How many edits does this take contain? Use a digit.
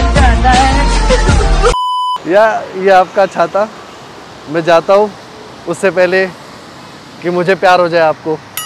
1